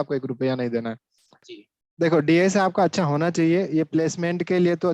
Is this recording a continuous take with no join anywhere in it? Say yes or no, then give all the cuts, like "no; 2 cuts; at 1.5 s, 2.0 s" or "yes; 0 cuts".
no; 1 cut; at 1.4 s